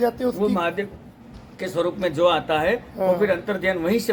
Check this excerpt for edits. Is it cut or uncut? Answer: uncut